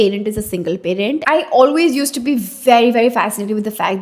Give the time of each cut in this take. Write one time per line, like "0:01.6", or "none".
0:01.2

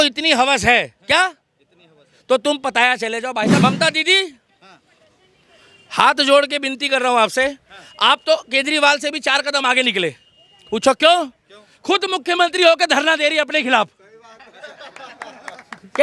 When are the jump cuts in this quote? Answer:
0:03.6

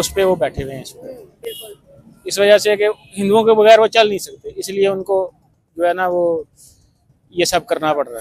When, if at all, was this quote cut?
none

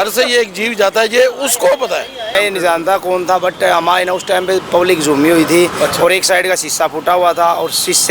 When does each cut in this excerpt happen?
0:02.4

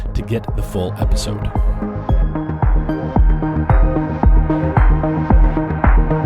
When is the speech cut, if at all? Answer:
0:00.9

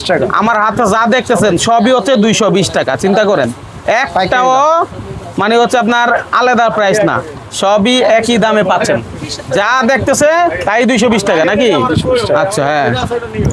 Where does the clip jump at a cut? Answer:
none

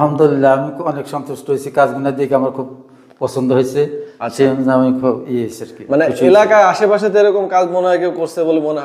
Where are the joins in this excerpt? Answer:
none

